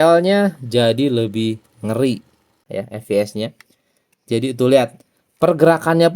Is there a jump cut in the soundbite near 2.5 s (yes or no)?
yes